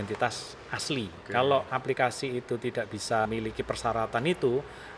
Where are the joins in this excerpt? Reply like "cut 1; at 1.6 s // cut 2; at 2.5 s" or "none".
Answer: cut 1; at 1.2 s // cut 2; at 3.3 s